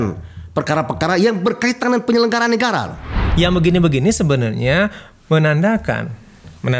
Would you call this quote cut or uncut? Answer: cut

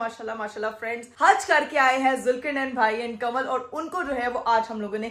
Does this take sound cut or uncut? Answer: uncut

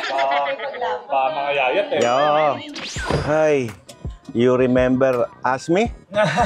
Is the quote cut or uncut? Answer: uncut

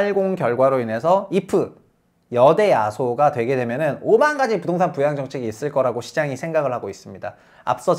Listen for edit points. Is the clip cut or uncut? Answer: uncut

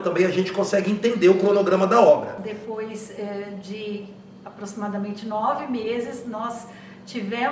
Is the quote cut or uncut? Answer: cut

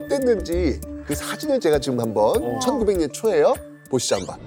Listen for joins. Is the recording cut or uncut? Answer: uncut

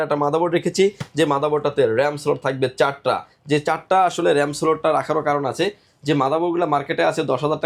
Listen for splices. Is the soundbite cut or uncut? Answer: uncut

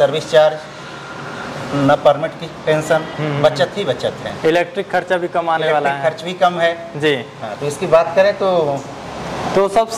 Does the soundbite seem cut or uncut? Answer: uncut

